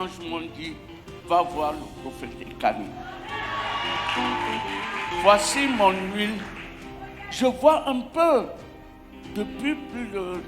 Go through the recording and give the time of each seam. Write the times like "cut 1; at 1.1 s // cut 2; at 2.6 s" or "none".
none